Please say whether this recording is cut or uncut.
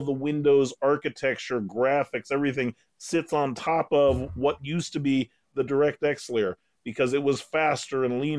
uncut